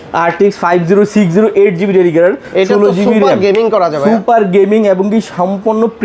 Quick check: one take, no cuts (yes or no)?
yes